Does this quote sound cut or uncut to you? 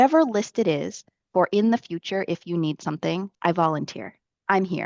cut